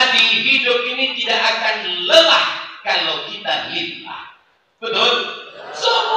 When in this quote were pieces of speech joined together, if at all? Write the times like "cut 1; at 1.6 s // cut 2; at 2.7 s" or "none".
none